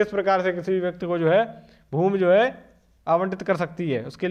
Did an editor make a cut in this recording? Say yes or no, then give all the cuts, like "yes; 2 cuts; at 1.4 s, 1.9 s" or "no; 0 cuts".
no; 0 cuts